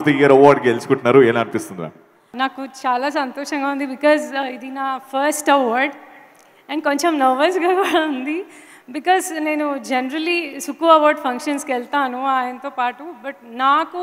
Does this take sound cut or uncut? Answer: cut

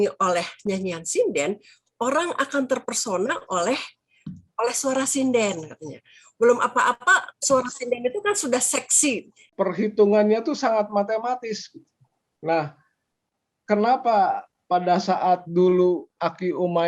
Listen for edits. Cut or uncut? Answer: cut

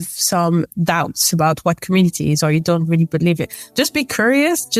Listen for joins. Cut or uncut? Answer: uncut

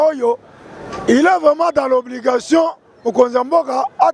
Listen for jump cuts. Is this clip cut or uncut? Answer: uncut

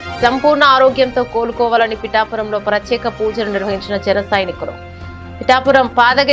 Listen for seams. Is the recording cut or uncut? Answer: uncut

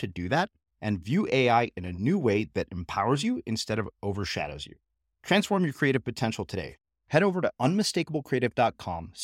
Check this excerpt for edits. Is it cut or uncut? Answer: uncut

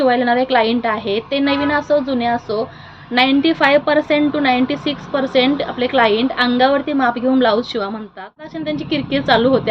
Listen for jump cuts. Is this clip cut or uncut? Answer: cut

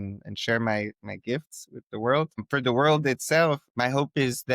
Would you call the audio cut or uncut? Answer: cut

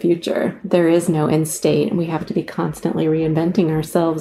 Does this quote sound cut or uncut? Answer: uncut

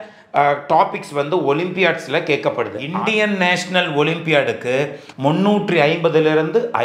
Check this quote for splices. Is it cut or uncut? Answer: cut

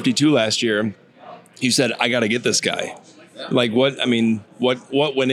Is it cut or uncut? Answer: uncut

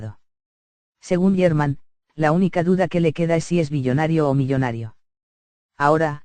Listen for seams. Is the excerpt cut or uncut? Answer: uncut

